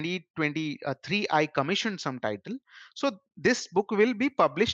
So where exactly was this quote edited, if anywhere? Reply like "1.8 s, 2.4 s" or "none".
none